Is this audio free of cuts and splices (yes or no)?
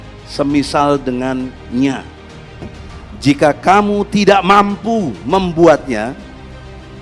no